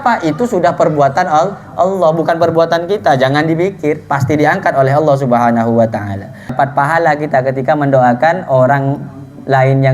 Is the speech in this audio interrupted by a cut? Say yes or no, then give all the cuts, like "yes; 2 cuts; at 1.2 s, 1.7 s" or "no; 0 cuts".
yes; 1 cut; at 6.5 s